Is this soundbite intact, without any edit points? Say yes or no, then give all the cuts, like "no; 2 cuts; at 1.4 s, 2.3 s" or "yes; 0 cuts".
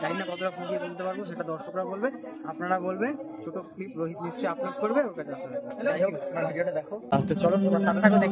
no; 1 cut; at 7.1 s